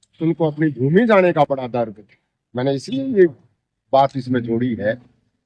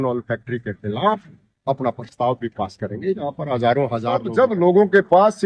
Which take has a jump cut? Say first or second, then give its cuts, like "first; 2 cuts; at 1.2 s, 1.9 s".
second; 1 cut; at 4.3 s